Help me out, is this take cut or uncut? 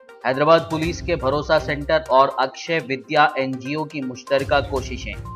uncut